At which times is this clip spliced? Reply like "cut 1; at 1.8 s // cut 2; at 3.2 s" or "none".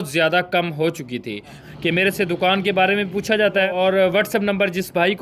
cut 1; at 1.6 s // cut 2; at 3.7 s

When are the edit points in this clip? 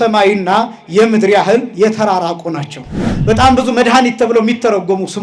cut 1; at 3.1 s

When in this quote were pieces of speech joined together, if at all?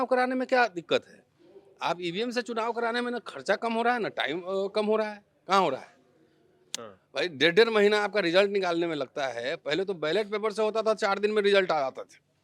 none

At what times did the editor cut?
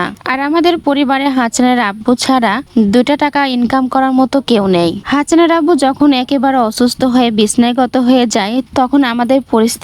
none

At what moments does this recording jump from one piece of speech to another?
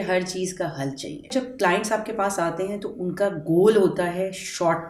cut 1; at 1.3 s

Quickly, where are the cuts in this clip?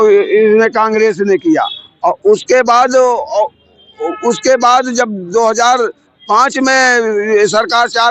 none

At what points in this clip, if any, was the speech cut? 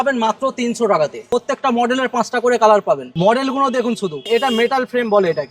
cut 1; at 1.2 s // cut 2; at 3.1 s // cut 3; at 4.2 s

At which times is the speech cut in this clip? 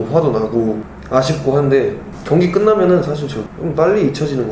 cut 1; at 0.9 s // cut 2; at 2.1 s // cut 3; at 3.4 s

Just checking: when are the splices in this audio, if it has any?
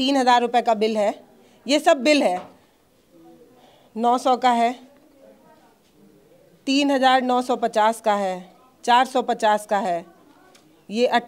none

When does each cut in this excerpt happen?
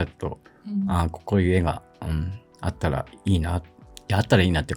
none

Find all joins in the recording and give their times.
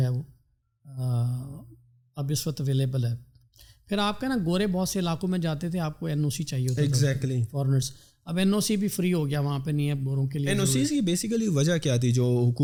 none

